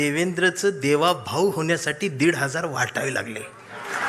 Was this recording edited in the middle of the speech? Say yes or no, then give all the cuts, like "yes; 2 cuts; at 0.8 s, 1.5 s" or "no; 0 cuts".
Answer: no; 0 cuts